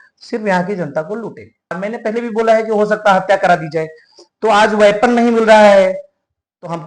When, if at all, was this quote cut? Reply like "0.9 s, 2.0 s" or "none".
1.8 s